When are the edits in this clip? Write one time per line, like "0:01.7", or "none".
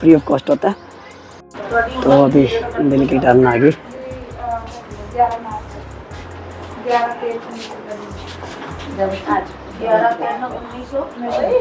0:01.3